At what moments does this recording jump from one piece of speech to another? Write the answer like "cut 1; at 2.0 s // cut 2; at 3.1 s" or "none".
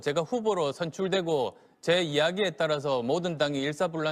none